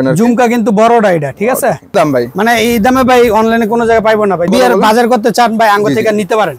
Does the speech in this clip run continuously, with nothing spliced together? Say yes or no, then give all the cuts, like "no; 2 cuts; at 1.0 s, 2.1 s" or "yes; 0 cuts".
no; 2 cuts; at 1.9 s, 4.5 s